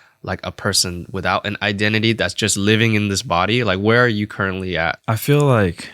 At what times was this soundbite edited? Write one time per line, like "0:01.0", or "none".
0:05.0